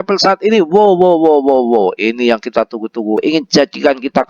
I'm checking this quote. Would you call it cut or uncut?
cut